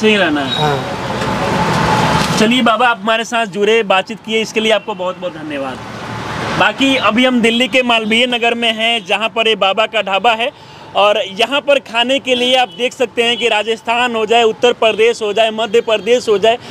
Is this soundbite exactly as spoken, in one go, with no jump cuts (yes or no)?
yes